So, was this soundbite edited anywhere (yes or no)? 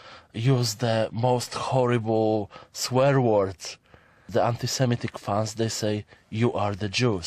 no